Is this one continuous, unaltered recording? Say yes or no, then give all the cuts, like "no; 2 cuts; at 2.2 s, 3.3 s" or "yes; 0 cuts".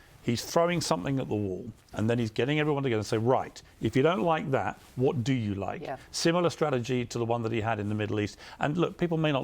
yes; 0 cuts